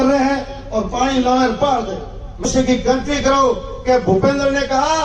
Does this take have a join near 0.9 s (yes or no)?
no